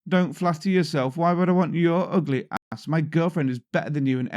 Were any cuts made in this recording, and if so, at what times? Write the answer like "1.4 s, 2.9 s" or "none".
none